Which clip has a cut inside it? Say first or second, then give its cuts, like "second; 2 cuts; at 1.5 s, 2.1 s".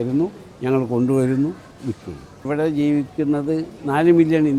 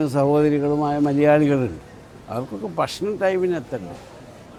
first; 1 cut; at 2.4 s